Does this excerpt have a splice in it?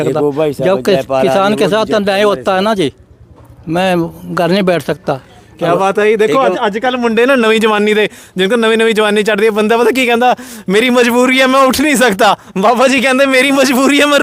no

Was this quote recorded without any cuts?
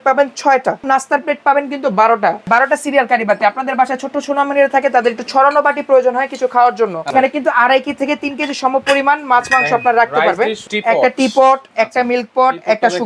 no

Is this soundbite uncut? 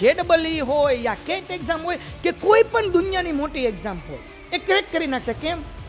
yes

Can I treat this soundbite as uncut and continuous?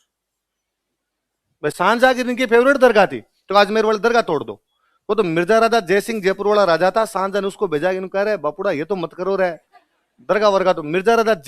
yes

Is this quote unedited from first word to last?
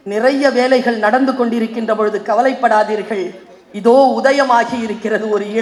yes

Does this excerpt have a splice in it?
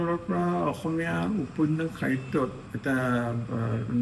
yes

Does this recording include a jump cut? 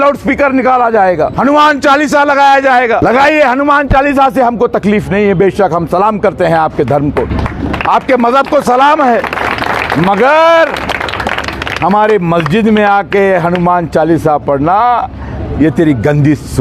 yes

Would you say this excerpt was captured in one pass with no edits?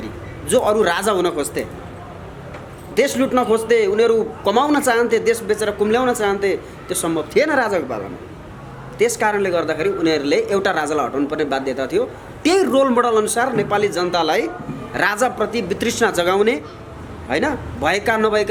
yes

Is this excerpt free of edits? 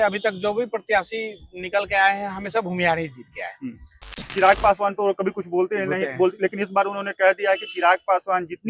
no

